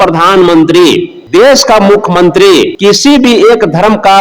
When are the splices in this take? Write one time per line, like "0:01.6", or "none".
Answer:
0:01.1
0:02.7